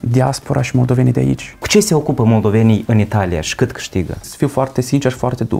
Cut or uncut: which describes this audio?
cut